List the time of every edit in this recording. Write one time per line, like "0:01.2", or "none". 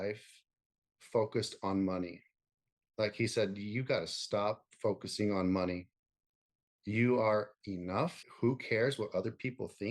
0:08.2